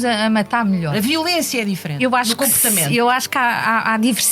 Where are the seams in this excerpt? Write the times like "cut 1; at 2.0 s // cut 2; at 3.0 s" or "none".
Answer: cut 1; at 0.9 s // cut 2; at 2.0 s